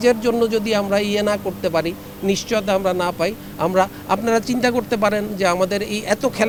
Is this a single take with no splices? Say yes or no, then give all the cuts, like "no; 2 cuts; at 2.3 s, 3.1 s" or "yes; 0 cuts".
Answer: yes; 0 cuts